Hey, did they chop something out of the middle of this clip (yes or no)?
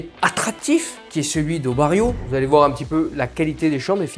yes